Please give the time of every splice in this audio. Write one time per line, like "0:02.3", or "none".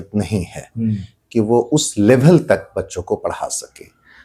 none